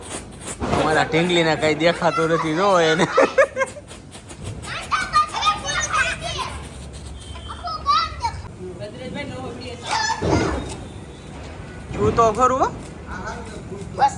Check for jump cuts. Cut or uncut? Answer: uncut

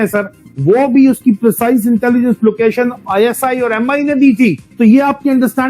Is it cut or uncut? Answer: cut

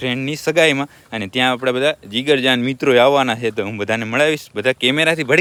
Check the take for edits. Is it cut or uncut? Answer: uncut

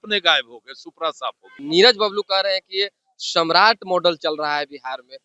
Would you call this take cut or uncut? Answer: cut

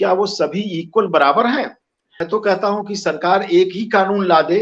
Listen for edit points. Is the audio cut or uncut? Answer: cut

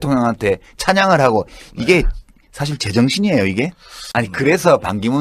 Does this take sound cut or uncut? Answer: uncut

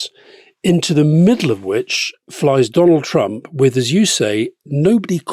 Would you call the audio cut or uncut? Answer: uncut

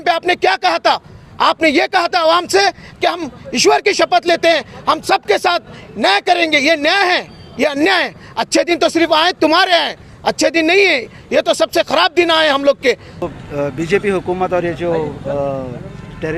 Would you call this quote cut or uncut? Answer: cut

